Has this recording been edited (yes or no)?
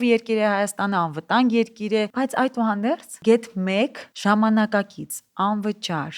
yes